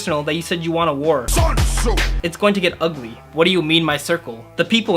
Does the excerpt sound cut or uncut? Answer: uncut